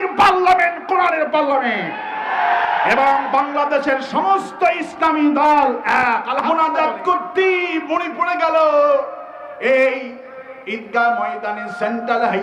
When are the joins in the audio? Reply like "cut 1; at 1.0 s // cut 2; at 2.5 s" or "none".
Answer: cut 1; at 6.5 s

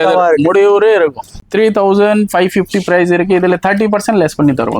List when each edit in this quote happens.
cut 1; at 1.4 s

